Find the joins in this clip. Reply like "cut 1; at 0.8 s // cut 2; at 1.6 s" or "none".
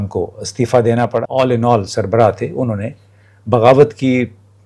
cut 1; at 1.3 s